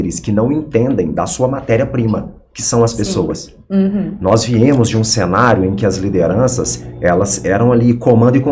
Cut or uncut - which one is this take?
uncut